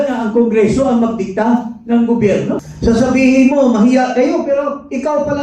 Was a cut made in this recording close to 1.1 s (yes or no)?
no